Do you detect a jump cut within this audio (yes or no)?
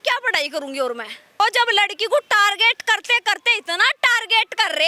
yes